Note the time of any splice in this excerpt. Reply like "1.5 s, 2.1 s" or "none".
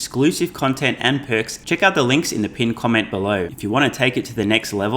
1.6 s, 3.5 s